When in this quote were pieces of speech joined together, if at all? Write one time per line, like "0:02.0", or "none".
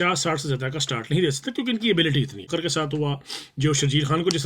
0:02.4